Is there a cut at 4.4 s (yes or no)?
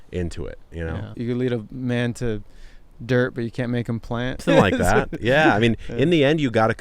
yes